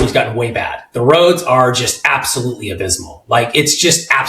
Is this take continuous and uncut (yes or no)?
yes